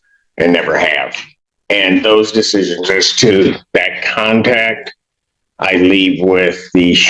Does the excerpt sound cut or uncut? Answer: uncut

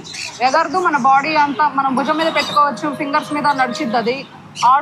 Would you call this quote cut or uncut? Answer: uncut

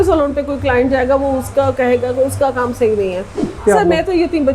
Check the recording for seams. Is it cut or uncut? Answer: cut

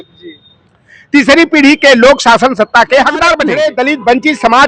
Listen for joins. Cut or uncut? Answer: cut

